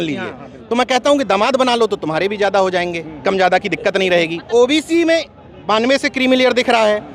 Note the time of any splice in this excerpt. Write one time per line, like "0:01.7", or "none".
0:04.4